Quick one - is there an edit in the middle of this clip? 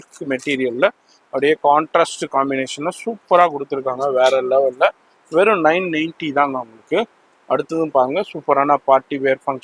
no; 0 cuts

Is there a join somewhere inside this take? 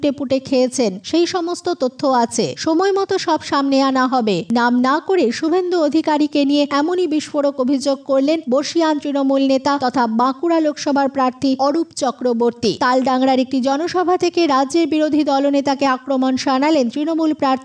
yes; 6 cuts; at 1.0 s, 6.7 s, 8.4 s, 9.8 s, 11.6 s, 12.8 s

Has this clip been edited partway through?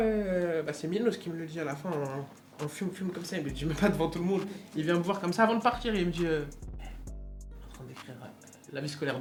no; 0 cuts

